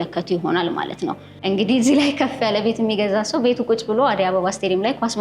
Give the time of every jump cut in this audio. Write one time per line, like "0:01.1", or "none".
0:01.3